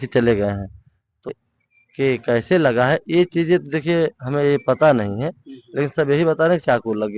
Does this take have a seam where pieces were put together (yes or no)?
yes